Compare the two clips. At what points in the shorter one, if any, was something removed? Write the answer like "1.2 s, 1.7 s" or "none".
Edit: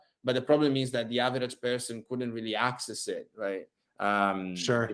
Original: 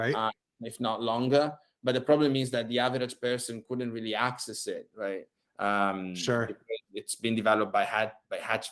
none